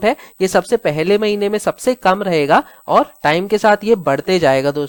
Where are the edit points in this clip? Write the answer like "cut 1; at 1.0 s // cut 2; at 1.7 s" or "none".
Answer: none